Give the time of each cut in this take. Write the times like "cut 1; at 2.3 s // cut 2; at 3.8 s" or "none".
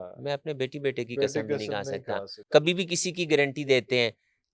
cut 1; at 2.4 s